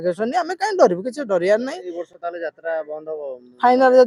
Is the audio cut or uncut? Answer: uncut